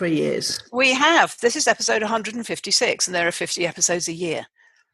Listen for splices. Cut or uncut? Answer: uncut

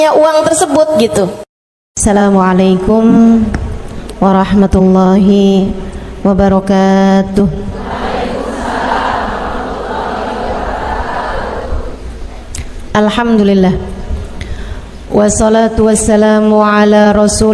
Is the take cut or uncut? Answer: cut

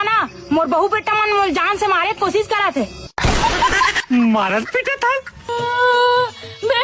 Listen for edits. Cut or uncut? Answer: cut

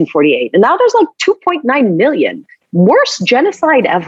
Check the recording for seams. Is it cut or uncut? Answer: uncut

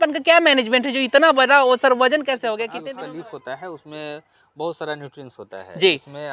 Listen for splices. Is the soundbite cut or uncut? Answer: cut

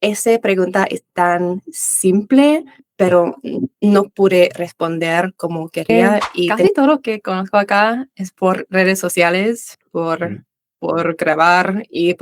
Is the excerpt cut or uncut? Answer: cut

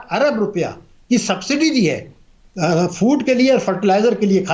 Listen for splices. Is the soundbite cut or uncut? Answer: uncut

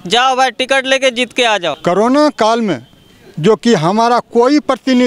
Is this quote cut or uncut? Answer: cut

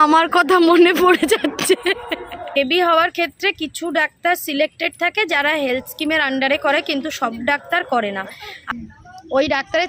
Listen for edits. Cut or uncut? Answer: cut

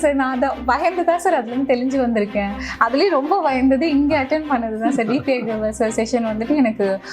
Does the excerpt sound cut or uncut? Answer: uncut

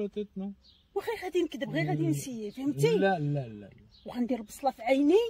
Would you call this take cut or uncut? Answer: uncut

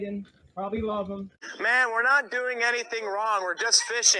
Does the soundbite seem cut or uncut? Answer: cut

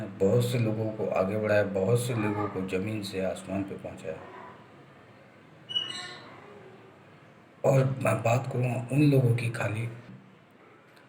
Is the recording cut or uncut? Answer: cut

